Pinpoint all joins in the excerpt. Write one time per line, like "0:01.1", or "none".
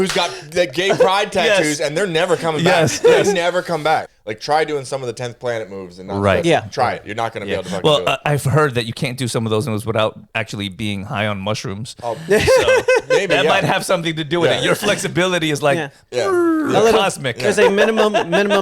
0:04.1